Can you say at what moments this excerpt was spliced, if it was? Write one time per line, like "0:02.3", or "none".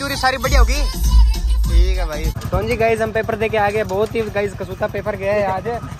none